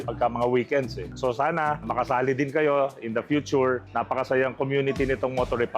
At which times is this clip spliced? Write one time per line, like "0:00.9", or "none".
0:03.9